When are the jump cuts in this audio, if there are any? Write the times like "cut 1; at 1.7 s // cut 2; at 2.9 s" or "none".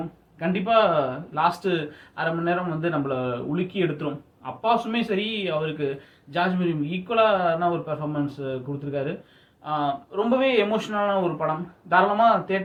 none